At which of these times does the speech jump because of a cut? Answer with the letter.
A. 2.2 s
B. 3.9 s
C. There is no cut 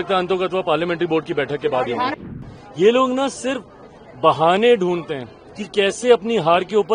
A